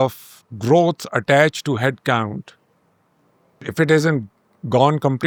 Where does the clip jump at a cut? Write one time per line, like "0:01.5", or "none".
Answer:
none